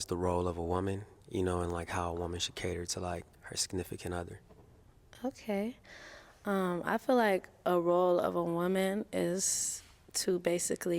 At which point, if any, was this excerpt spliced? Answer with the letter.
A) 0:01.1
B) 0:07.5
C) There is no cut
C